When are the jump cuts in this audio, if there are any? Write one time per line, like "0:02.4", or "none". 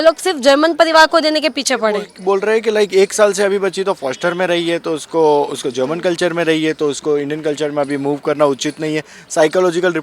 0:02.2